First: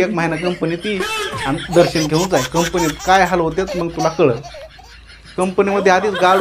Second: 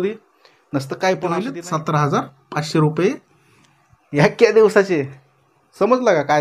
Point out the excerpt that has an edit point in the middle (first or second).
second